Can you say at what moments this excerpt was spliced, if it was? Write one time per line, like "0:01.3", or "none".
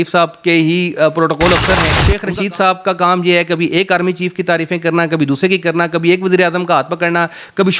0:02.1